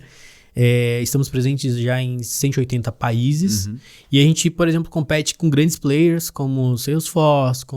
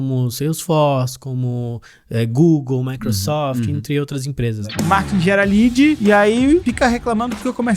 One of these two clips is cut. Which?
second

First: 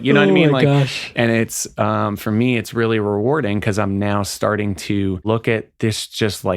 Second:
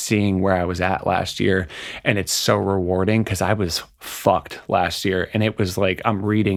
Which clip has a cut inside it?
first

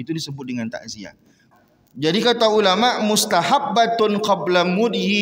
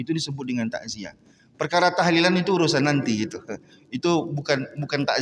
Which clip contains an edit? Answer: first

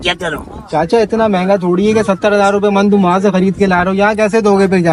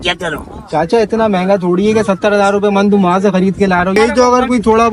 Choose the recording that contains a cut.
second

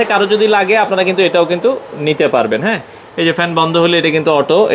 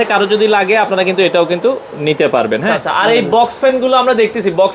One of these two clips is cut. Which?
second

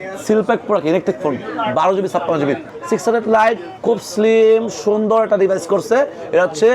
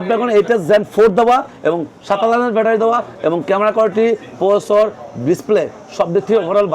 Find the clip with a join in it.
first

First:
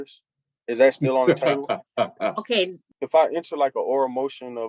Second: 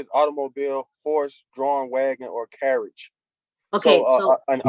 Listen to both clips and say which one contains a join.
first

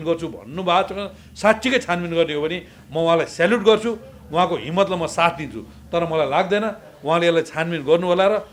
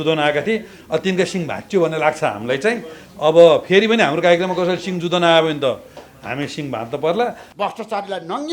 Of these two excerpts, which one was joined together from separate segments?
second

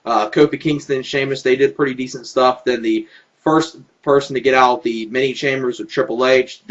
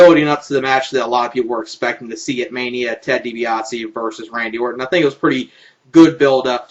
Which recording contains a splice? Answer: second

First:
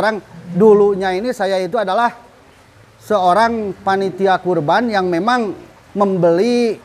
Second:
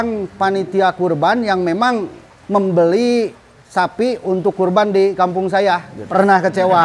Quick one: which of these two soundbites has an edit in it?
second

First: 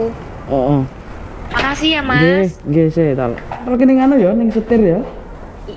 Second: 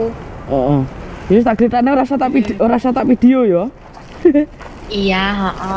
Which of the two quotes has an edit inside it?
first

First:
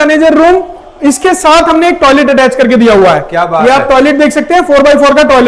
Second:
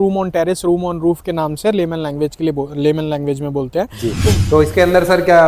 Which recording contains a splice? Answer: second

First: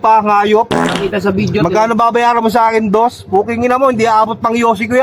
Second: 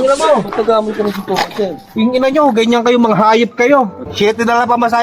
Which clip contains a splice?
second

